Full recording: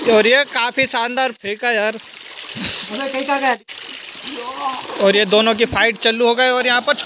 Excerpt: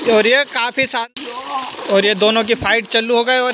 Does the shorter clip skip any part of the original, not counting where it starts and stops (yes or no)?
yes